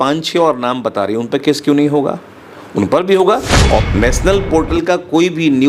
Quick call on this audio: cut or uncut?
cut